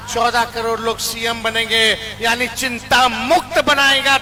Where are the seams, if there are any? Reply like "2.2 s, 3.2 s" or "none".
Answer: none